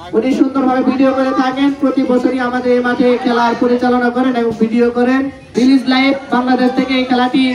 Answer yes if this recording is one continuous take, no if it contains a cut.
no